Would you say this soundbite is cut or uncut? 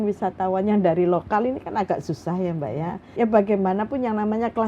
cut